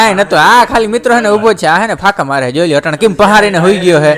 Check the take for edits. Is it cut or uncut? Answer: uncut